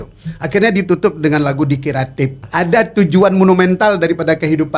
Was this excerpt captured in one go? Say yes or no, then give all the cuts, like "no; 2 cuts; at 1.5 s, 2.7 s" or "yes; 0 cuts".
no; 1 cut; at 2.4 s